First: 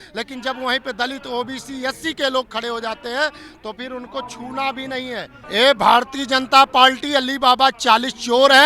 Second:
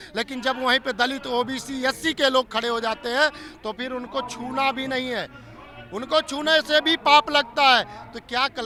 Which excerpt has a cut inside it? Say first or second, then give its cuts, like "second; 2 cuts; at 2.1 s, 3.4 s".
first; 1 cut; at 5.4 s